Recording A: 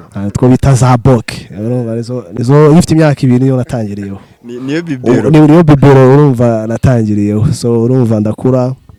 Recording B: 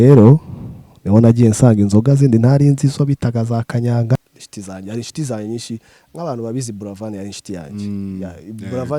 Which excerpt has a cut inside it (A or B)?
B